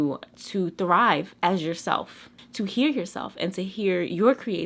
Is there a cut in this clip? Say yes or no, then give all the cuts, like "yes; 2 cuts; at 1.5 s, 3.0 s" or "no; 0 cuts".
yes; 1 cut; at 2.4 s